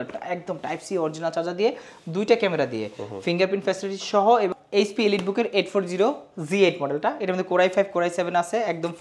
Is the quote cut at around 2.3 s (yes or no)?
no